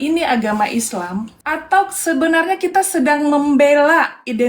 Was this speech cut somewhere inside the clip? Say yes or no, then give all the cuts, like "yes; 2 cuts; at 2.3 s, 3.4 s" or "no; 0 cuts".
yes; 1 cut; at 1.3 s